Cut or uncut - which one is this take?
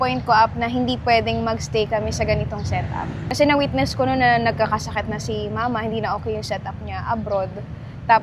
uncut